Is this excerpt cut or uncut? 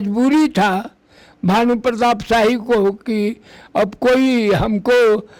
uncut